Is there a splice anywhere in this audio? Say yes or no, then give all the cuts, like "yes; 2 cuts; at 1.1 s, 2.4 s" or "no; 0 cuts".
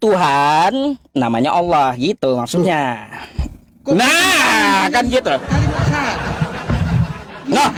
no; 0 cuts